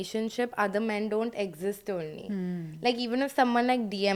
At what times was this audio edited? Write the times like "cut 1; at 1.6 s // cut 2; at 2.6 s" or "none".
none